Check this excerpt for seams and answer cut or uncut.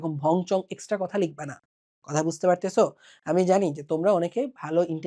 uncut